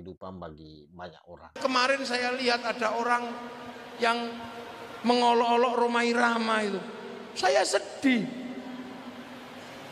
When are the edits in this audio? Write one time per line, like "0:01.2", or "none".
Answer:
0:01.6